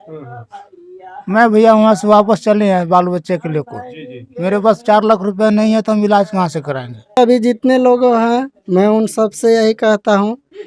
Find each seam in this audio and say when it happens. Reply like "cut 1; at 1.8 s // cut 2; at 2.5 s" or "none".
cut 1; at 7.2 s